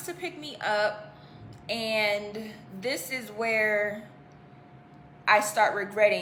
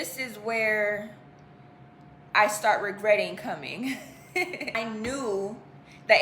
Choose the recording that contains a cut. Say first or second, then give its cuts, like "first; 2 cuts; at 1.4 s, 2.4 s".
second; 1 cut; at 4.7 s